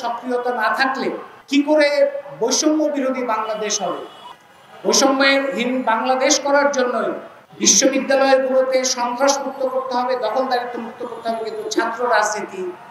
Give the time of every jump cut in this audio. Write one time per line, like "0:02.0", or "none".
none